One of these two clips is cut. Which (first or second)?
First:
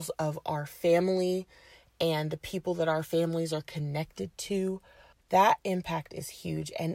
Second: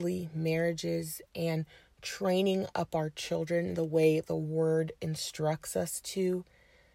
first